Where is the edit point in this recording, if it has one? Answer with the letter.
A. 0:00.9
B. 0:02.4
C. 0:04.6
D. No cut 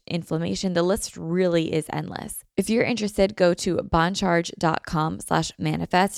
B